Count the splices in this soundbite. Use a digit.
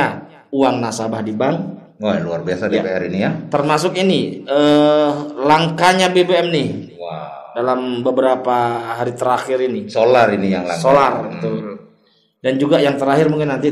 0